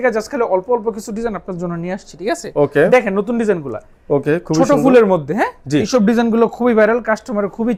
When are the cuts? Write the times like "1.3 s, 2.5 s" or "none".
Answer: none